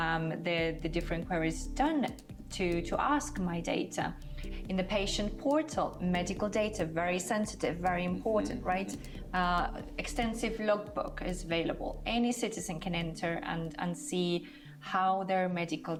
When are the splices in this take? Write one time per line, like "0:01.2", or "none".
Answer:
none